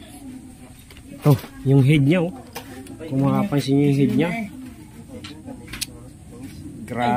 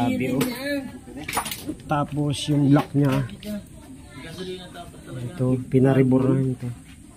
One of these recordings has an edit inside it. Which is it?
second; 1 cut; at 1.5 s

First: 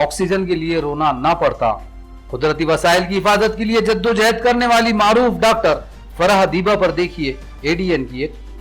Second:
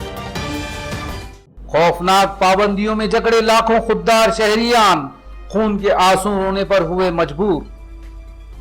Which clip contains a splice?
second; 1 cut; at 0.9 s

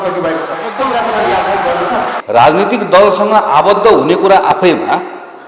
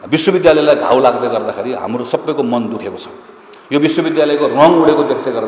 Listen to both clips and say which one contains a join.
first; 1 cut; at 2.2 s

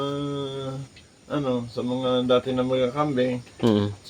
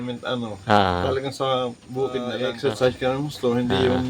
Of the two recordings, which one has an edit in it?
second; 1 cut; at 2.3 s

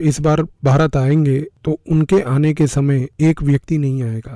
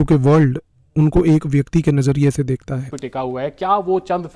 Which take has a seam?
second; 1 cut; at 2.9 s

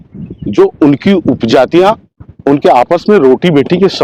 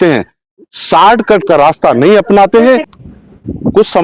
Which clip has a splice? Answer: second; 1 cut; at 2.9 s

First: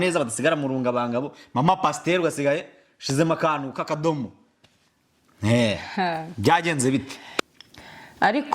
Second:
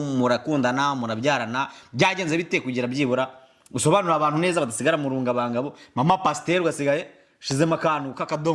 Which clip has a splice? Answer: first; 1 cut; at 7.6 s

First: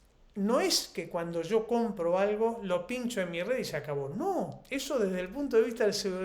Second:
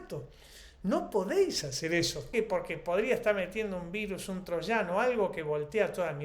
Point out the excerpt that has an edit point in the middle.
second; 1 cut; at 2.3 s

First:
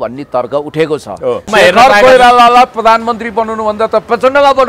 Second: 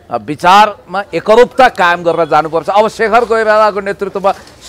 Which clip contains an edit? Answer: first; 1 cut; at 1.4 s

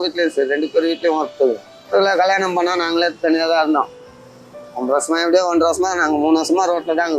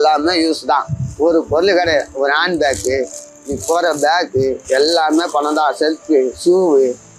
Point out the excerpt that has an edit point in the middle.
first; 1 cut; at 1.9 s

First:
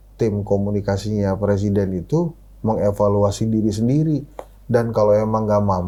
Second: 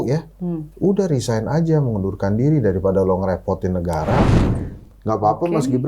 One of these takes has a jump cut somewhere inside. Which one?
second; 1 cut; at 4.4 s

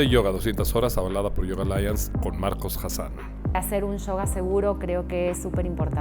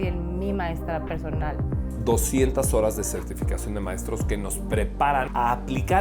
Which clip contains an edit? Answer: first; 1 cut; at 1.3 s

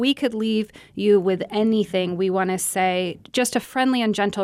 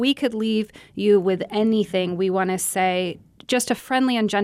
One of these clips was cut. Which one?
first; 1 cut; at 3.2 s

